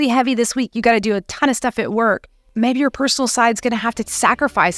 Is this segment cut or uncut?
cut